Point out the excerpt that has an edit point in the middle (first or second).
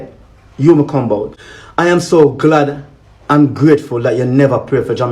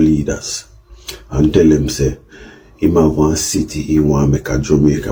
first